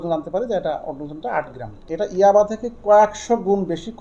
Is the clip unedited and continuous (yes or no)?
no